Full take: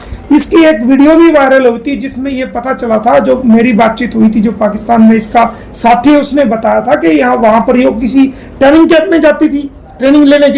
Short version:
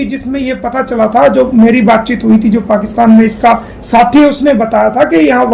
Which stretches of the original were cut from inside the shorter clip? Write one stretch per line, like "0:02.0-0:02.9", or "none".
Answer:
none

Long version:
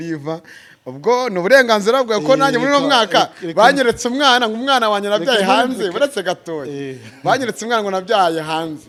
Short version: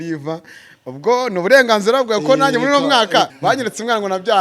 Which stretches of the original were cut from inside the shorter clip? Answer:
0:03.3-0:07.2

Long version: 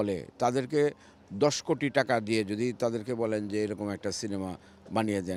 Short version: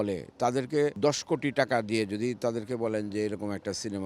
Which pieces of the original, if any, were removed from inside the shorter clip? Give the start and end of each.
0:00.9-0:01.3

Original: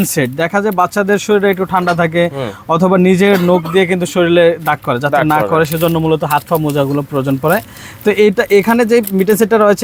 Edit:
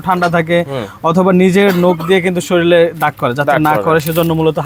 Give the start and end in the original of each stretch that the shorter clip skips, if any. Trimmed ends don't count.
none

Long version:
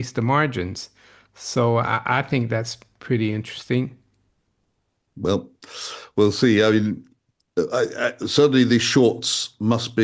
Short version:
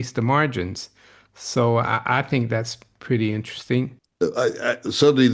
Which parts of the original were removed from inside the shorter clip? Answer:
0:04.0-0:07.4

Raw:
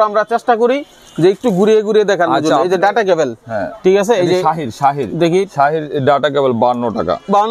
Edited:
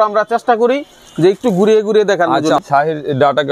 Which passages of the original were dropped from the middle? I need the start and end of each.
0:02.6-0:05.5

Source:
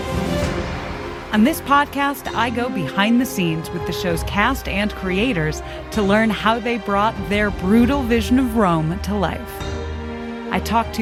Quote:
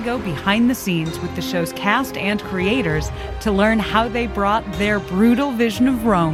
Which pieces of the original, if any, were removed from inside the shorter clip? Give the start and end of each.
none

